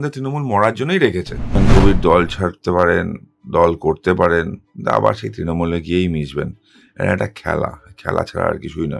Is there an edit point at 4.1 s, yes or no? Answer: no